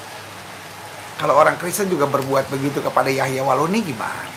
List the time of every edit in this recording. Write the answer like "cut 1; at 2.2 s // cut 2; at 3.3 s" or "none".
none